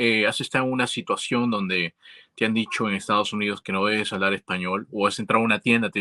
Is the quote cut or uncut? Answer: uncut